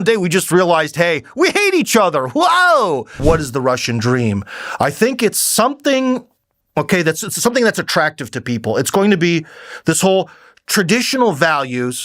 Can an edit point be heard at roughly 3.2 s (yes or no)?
yes